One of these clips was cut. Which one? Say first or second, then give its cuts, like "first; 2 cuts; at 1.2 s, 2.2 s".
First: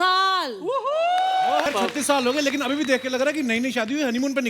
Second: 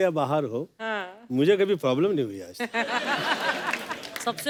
first; 1 cut; at 1.6 s